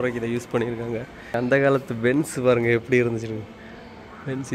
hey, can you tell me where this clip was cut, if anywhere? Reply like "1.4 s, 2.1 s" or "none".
1.4 s

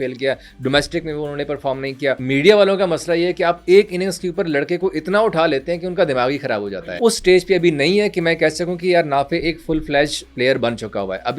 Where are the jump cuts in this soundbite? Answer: 2.2 s, 6.9 s

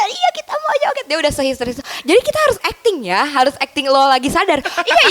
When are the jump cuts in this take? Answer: none

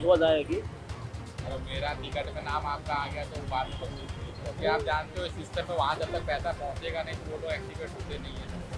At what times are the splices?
4.6 s

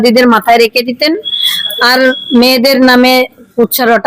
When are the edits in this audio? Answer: none

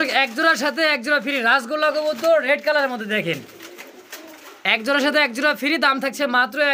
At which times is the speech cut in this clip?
none

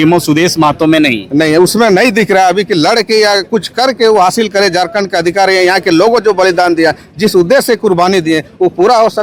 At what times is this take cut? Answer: none

